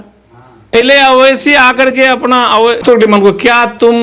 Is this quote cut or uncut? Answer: cut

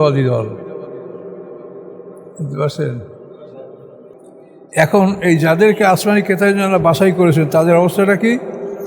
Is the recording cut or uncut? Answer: cut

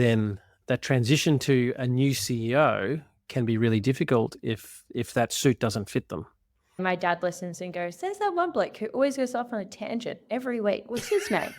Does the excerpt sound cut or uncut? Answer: cut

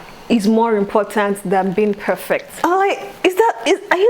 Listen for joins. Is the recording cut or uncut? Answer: cut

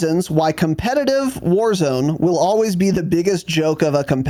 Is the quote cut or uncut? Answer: uncut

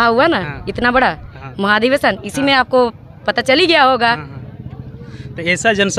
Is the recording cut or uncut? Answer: uncut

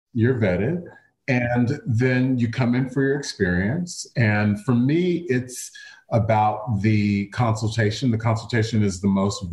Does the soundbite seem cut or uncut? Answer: uncut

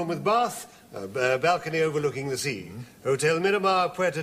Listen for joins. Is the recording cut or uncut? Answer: cut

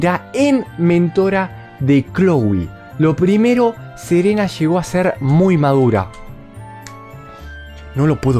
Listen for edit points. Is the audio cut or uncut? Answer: uncut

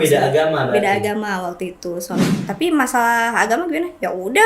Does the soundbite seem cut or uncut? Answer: cut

